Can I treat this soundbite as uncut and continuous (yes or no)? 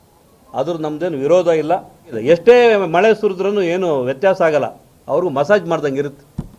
no